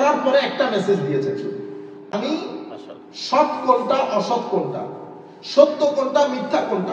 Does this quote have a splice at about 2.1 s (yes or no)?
yes